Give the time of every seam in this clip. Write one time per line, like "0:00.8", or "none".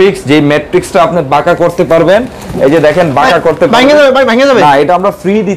none